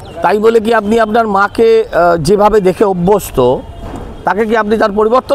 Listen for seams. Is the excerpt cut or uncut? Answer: uncut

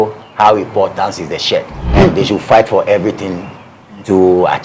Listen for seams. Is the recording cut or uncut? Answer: cut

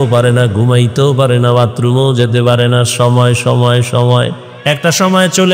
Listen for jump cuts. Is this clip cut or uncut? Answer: cut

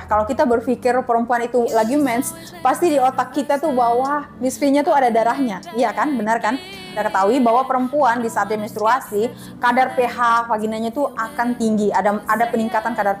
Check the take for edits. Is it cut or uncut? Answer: cut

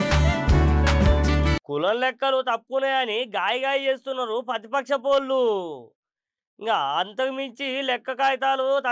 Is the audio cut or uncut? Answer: cut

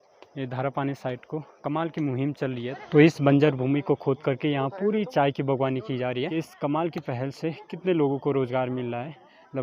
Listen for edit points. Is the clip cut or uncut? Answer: cut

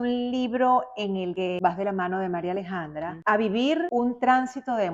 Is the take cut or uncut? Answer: cut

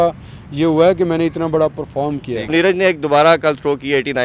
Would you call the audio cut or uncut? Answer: cut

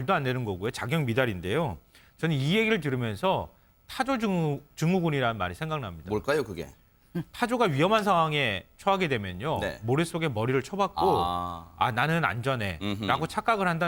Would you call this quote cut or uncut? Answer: uncut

